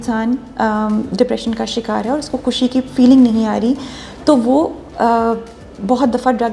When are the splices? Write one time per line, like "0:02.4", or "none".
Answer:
none